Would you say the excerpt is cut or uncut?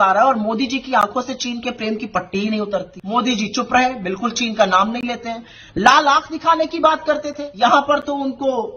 cut